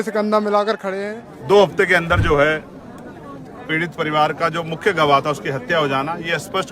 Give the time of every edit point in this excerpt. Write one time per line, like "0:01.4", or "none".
0:00.9